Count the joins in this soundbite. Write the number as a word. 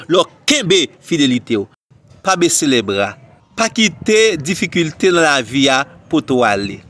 one